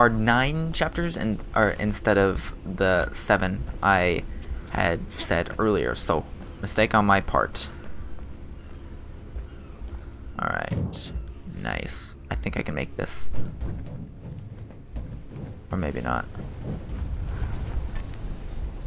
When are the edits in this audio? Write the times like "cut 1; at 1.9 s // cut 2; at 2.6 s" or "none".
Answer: cut 1; at 4.9 s